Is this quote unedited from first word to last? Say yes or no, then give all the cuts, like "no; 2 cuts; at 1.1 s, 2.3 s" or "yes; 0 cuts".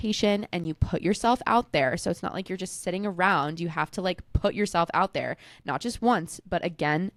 yes; 0 cuts